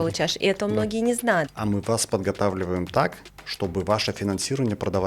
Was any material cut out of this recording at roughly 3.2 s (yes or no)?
no